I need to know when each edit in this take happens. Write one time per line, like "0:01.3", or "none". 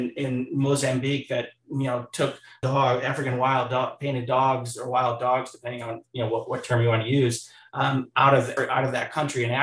0:02.6
0:08.5